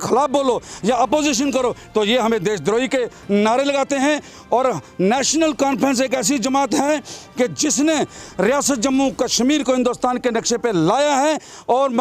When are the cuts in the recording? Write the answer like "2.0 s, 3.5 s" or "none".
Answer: none